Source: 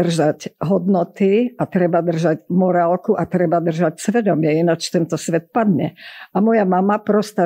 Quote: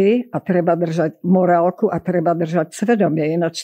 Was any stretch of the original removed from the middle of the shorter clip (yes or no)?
no